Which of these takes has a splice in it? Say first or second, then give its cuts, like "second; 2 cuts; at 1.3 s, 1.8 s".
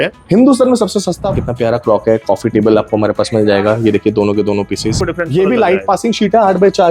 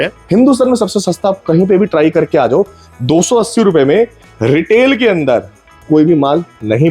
first; 2 cuts; at 1.4 s, 5.0 s